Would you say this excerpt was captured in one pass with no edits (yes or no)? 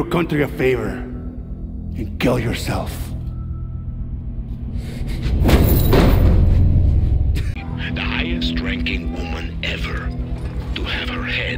no